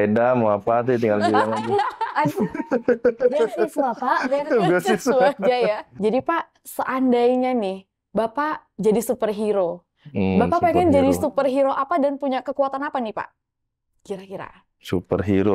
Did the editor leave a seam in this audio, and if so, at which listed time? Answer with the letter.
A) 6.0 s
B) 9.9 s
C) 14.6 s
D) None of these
A